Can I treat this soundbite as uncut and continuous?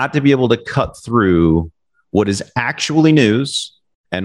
yes; 0 cuts

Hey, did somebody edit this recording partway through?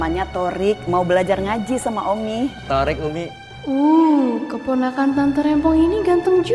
yes; 2 cuts; at 2.6 s, 3.4 s

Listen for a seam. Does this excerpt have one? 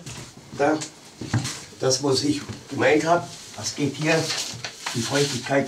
no; 0 cuts

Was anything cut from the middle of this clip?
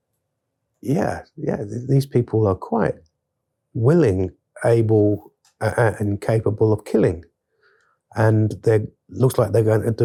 no; 0 cuts

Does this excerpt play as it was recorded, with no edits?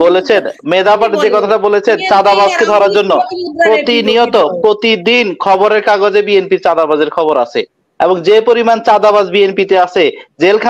yes; 0 cuts

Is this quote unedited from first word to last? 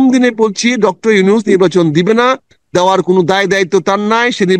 yes; 0 cuts

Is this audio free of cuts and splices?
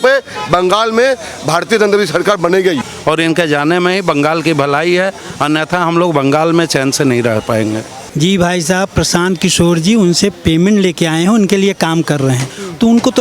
no; 2 cuts; at 2.9 s, 8.0 s

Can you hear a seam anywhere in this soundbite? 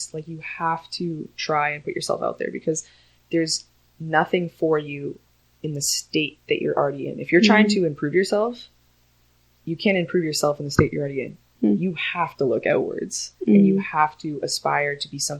no; 0 cuts

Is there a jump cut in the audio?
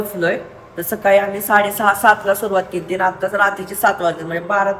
no; 0 cuts

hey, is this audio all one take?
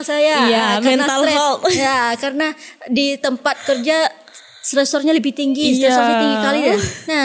yes; 0 cuts

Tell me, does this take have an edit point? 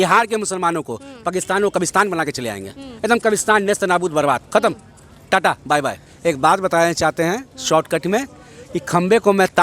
yes; 1 cut; at 6.1 s

